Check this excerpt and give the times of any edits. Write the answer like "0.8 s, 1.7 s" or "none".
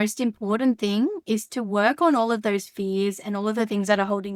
none